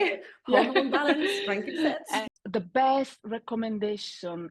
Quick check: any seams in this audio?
yes; 1 cut; at 2.1 s

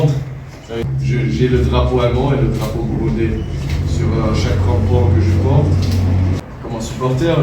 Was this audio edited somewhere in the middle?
yes; 2 cuts; at 0.9 s, 6.4 s

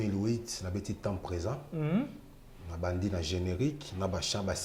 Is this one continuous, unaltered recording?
yes; 0 cuts

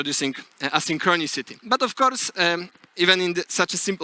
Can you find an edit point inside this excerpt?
yes; 1 cut; at 1.5 s

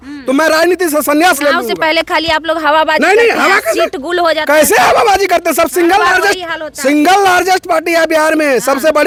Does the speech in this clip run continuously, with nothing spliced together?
yes; 0 cuts

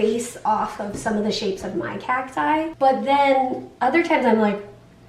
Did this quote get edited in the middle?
yes; 1 cut; at 2.7 s

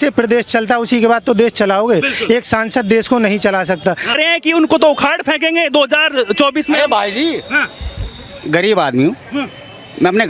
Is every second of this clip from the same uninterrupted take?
no; 1 cut; at 4.1 s

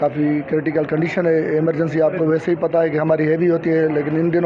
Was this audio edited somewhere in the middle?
no; 0 cuts

